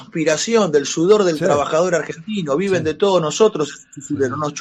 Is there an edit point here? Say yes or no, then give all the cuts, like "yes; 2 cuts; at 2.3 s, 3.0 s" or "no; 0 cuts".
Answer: no; 0 cuts